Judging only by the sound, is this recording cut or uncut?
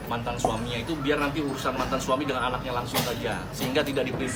uncut